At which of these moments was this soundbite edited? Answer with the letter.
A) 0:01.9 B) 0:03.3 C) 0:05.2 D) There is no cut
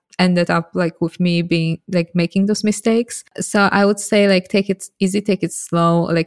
B